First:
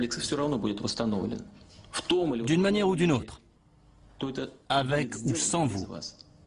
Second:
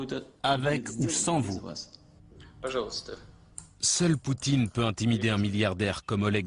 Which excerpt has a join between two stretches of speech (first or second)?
first